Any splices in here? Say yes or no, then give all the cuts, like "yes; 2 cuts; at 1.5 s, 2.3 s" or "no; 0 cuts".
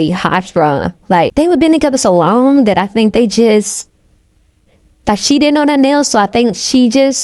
yes; 1 cut; at 1.3 s